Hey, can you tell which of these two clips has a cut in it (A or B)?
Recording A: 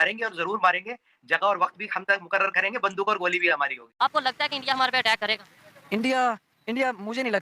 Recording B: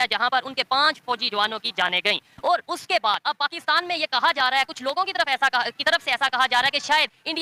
A